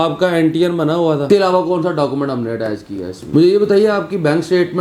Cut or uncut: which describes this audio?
cut